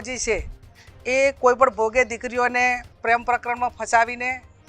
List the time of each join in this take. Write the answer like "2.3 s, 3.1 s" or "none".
2.9 s